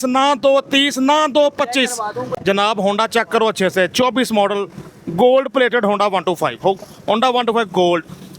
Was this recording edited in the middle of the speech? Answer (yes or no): yes